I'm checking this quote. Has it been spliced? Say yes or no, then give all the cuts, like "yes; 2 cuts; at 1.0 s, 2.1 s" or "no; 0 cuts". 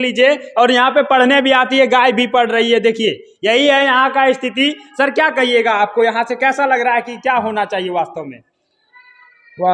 no; 0 cuts